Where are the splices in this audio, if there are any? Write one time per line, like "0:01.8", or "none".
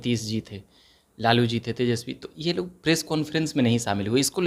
none